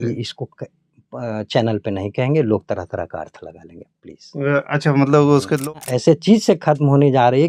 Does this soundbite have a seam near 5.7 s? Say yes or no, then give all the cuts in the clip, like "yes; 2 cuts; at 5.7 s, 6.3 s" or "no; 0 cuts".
yes; 1 cut; at 5.7 s